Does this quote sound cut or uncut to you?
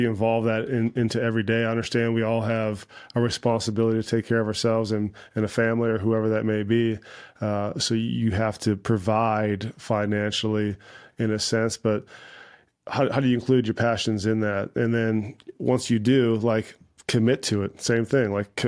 uncut